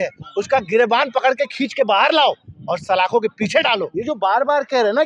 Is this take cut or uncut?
cut